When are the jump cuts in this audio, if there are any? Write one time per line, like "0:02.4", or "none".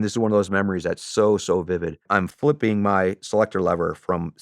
0:02.3